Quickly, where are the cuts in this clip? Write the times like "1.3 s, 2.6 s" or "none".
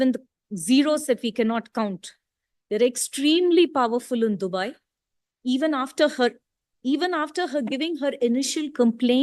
none

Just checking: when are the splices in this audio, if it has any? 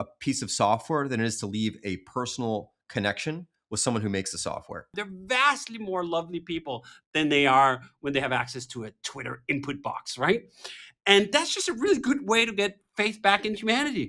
5.1 s

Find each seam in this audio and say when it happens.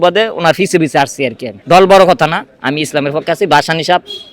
1.5 s

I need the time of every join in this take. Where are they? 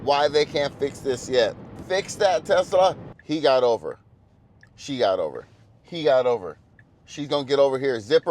1.7 s, 3.1 s

